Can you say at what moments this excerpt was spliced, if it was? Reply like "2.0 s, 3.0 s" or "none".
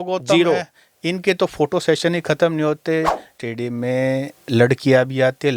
3.3 s